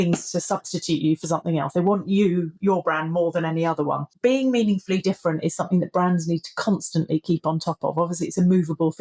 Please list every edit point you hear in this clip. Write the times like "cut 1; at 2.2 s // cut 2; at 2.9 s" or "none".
cut 1; at 4.1 s